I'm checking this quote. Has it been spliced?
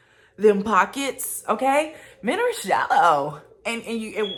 no; 0 cuts

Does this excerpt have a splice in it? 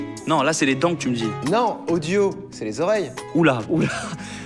no; 0 cuts

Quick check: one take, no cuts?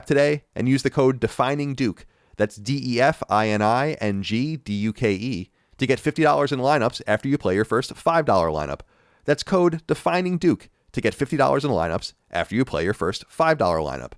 yes; 0 cuts

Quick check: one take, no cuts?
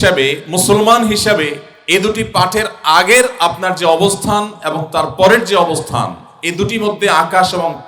no; 1 cut; at 1.7 s

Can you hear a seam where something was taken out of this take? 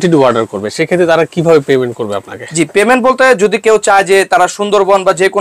no; 0 cuts

